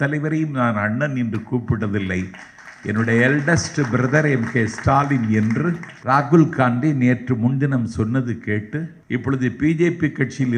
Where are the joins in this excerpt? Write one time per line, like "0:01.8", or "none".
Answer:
0:05.9
0:08.9